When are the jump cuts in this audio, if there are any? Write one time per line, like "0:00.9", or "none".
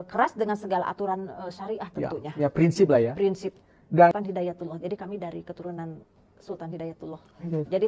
0:04.1